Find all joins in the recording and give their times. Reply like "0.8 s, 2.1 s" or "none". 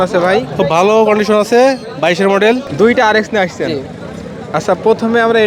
2.7 s